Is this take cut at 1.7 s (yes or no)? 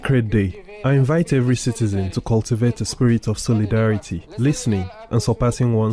no